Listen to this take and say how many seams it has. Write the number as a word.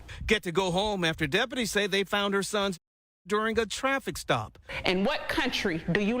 zero